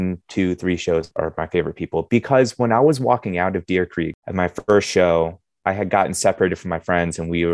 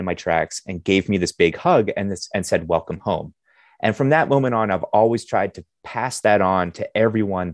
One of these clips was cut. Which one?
first; 2 cuts; at 1.1 s, 4.2 s

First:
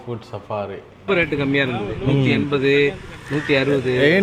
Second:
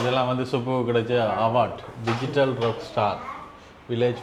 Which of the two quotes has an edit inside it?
first; 1 cut; at 1.1 s

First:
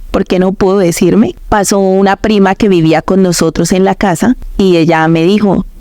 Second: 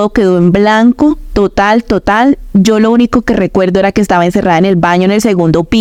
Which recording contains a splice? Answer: first; 2 cuts; at 1.4 s, 4.5 s

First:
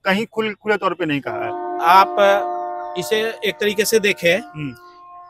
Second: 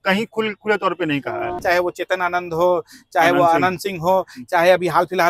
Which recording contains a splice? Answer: second; 1 cut; at 1.6 s

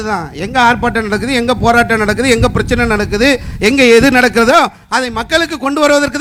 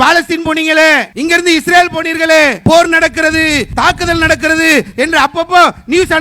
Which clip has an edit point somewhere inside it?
second; 3 cuts; at 1.1 s, 2.6 s, 3.7 s

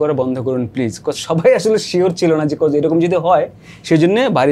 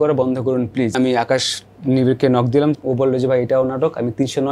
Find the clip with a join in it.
second; 2 cuts; at 0.9 s, 2.7 s

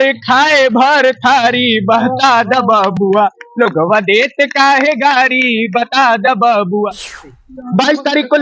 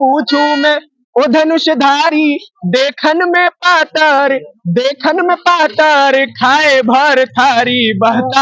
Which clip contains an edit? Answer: first; 1 cut; at 7.2 s

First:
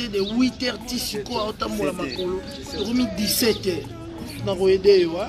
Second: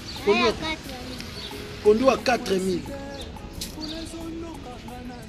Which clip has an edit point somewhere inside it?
first; 2 cuts; at 2.7 s, 4.3 s

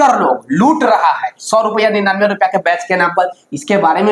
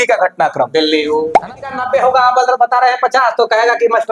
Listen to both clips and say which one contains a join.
second; 1 cut; at 1.4 s

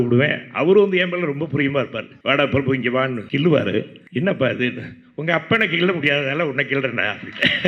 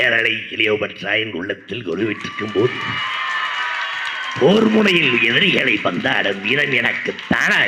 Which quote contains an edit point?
first; 3 cuts; at 2.0 s, 3.2 s, 4.0 s

